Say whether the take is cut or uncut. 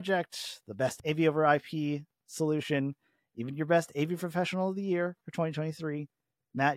cut